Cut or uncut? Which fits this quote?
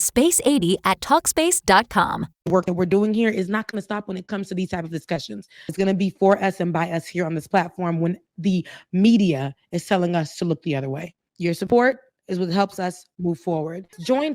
cut